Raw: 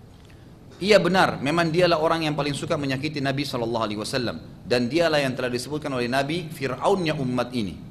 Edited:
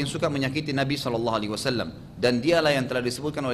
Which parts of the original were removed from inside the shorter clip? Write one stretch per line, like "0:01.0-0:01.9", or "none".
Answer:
none